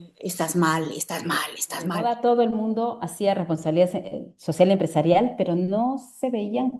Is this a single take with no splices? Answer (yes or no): no